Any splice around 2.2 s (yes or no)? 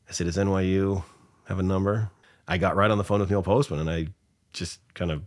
yes